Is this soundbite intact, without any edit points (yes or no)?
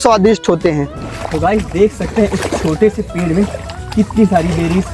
no